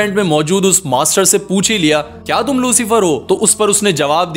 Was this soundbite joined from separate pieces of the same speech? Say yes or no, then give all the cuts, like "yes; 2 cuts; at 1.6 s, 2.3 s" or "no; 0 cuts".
no; 0 cuts